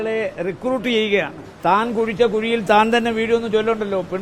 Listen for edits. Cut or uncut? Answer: cut